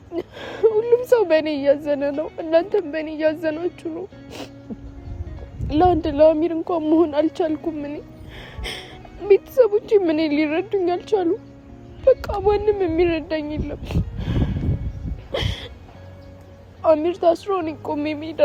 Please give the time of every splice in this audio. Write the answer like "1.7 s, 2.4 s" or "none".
none